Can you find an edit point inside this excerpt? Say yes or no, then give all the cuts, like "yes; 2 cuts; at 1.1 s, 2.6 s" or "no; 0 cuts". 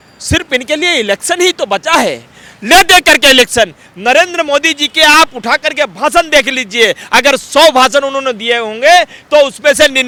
no; 0 cuts